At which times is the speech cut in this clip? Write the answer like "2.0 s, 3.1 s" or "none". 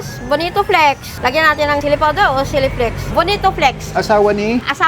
1.1 s, 3.1 s